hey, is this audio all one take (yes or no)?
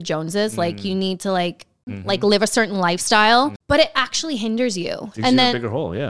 no